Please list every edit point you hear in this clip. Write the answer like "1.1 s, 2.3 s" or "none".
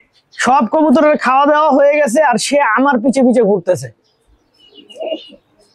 none